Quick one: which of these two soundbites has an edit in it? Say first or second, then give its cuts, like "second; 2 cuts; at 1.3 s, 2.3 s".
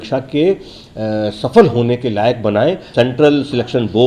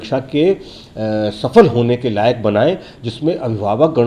first; 1 cut; at 2.8 s